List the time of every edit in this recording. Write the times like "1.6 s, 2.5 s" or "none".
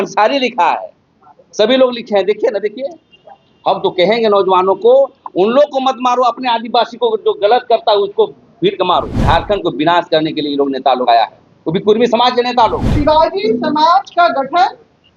9.1 s, 12.9 s